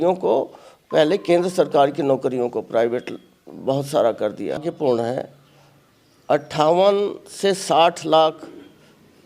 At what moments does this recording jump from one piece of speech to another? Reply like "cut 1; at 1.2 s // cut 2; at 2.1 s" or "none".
cut 1; at 4.6 s